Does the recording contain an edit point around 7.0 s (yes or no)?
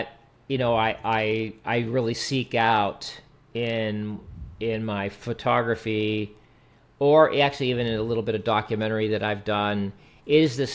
no